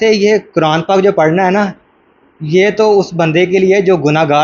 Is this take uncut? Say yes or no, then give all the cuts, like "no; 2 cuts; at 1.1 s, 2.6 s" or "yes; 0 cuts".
yes; 0 cuts